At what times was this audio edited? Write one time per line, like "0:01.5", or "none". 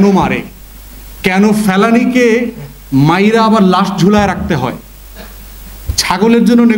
none